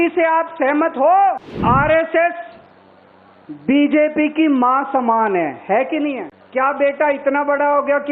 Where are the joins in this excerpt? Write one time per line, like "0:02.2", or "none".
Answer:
0:01.5
0:06.3

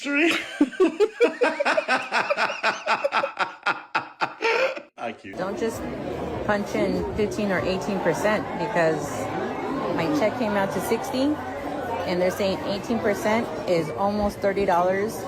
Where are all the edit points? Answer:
0:05.3

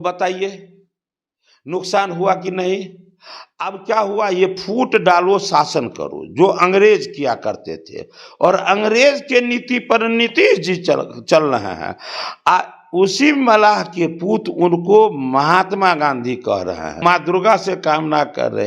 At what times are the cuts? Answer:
0:17.0

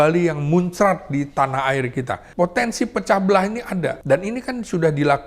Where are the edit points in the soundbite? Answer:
0:02.2
0:04.0

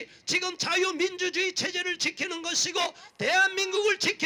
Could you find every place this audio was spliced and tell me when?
none

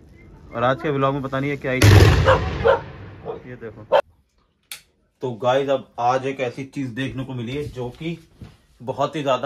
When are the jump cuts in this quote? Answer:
0:04.0

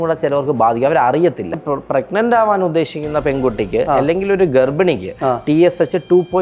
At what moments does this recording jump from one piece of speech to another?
0:01.6

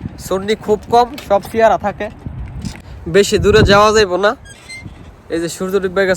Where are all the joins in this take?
0:03.0

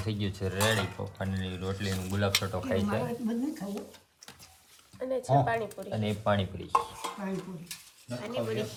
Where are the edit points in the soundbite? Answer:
none

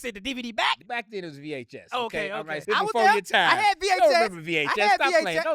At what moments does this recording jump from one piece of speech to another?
0:00.8
0:02.6

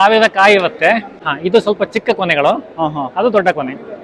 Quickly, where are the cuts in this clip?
0:01.1

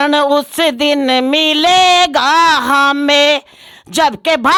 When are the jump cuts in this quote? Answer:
none

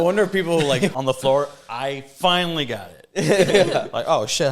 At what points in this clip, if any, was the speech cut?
0:00.9

